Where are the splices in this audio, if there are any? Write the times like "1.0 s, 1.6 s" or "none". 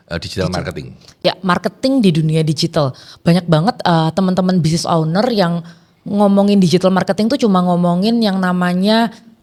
none